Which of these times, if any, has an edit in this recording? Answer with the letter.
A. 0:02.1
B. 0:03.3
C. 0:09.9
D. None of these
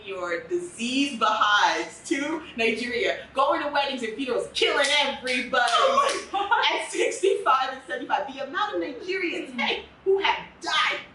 D